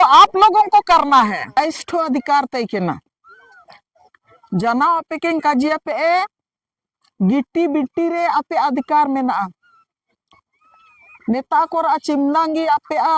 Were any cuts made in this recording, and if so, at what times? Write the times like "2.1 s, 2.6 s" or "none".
1.6 s